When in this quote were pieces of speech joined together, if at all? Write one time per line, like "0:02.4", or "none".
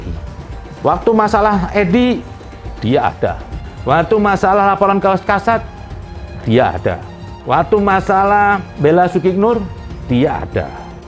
none